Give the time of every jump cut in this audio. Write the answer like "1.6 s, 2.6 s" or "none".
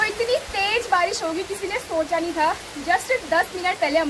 none

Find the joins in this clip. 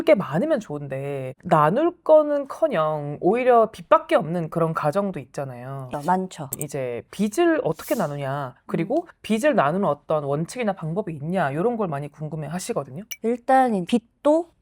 6.4 s, 13.0 s

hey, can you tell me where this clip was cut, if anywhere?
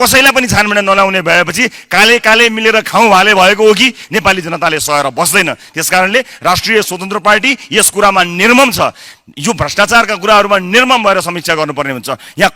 4.0 s

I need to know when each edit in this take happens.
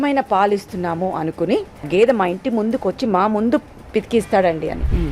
1.9 s

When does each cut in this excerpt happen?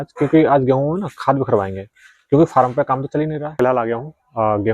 3.4 s

